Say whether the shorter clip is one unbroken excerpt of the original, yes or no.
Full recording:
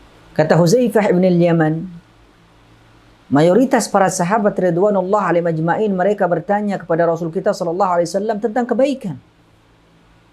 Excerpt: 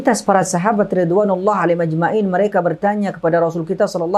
yes